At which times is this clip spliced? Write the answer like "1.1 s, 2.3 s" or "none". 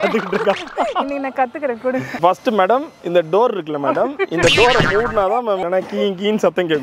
2.1 s, 5.6 s